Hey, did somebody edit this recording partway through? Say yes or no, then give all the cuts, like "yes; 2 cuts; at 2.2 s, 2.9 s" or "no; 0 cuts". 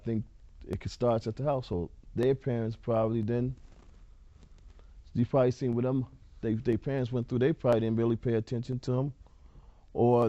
yes; 1 cut; at 9.3 s